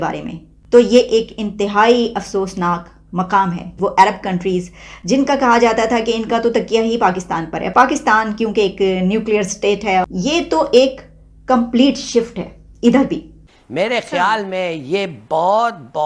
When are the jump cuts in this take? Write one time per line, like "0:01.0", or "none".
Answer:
0:03.7
0:09.9
0:13.4